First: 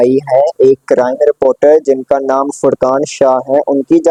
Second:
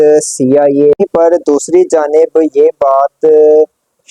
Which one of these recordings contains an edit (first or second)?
second